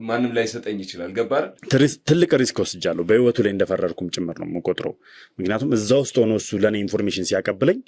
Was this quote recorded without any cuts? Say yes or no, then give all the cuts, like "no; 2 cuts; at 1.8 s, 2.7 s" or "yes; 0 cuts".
no; 1 cut; at 1.6 s